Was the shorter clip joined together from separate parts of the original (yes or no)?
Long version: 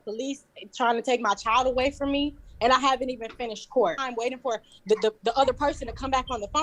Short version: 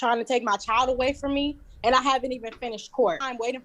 no